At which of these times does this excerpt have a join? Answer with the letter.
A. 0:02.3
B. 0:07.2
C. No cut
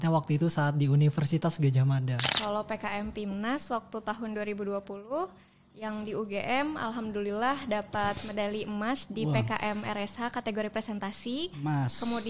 A